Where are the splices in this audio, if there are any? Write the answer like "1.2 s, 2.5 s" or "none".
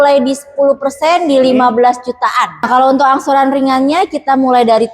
2.6 s